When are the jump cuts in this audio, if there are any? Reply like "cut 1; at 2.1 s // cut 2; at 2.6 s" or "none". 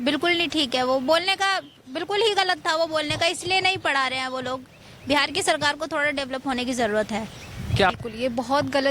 cut 1; at 7.9 s